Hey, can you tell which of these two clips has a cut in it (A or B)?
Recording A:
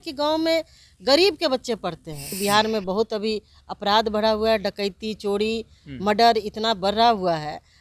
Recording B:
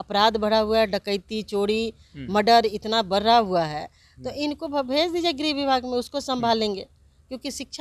A